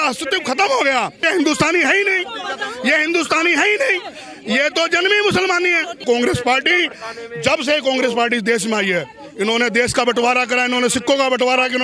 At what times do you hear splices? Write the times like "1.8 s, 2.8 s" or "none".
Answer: 1.2 s, 6.0 s